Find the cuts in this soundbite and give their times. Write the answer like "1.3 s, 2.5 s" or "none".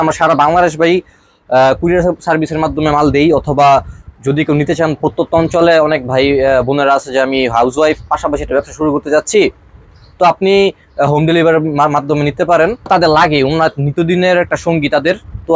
12.9 s